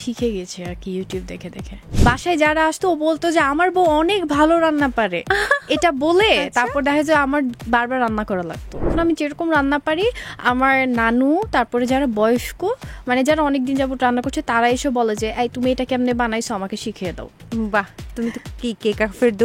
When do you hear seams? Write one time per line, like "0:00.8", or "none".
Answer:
0:01.8
0:08.9